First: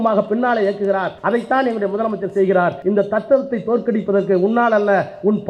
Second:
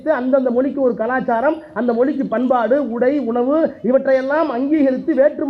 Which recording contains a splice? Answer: first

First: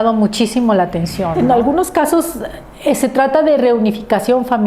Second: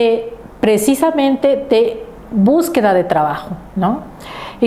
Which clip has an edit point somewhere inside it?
first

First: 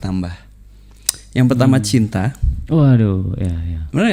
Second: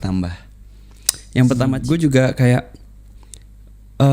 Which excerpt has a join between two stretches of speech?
second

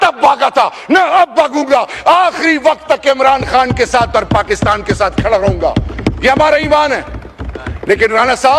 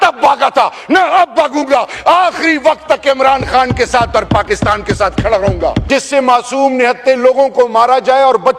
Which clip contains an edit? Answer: second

